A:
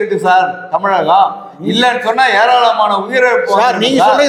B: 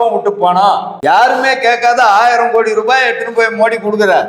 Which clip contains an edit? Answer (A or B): B